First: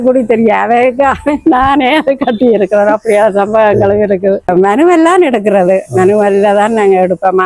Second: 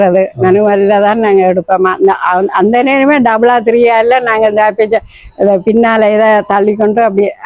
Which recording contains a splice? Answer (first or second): first